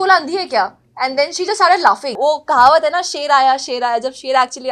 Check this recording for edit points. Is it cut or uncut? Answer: cut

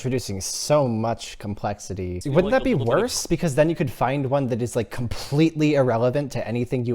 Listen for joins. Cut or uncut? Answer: cut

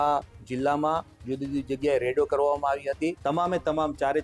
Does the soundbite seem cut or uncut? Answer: cut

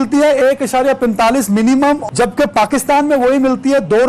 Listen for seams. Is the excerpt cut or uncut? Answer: cut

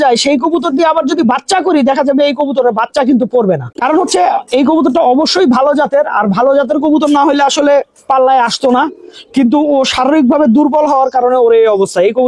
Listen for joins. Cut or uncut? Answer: uncut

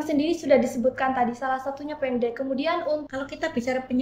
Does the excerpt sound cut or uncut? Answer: cut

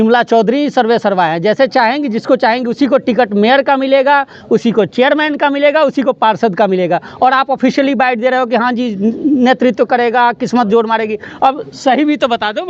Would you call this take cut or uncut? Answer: uncut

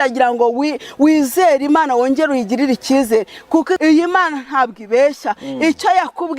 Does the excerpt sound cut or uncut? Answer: cut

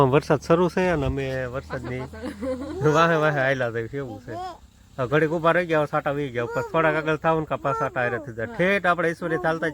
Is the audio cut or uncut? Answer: uncut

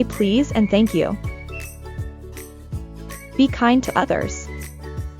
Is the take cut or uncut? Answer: cut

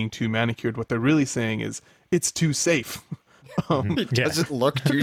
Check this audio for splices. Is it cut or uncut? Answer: uncut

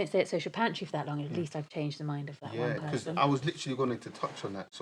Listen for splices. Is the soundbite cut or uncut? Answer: uncut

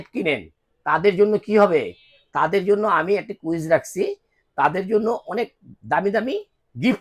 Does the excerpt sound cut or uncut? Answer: uncut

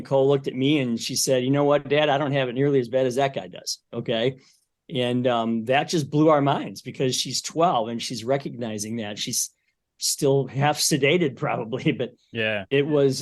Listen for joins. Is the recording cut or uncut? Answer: uncut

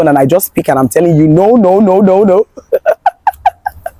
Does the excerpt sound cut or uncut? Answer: uncut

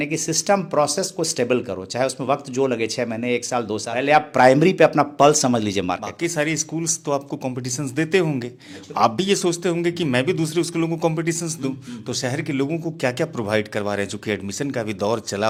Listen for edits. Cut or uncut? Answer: uncut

